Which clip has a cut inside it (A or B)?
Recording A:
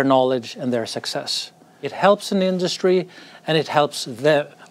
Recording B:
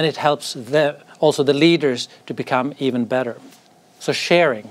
A